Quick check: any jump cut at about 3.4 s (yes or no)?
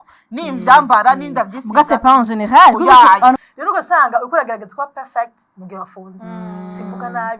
yes